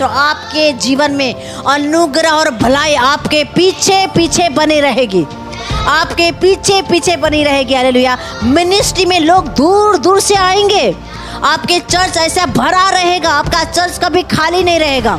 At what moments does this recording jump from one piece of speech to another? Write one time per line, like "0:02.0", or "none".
none